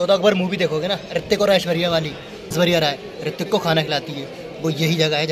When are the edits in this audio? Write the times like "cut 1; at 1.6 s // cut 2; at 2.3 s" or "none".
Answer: cut 1; at 2.5 s